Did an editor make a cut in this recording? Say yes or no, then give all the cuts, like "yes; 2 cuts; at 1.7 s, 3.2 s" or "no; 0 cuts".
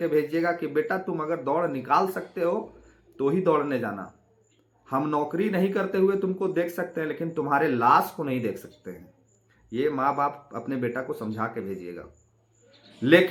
no; 0 cuts